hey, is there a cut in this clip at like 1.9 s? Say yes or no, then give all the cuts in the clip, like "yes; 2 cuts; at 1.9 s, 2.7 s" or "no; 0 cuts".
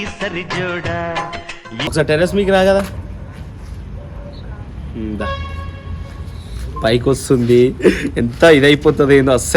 yes; 1 cut; at 1.9 s